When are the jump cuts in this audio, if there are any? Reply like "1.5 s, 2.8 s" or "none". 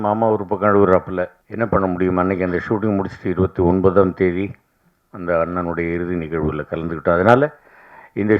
1.4 s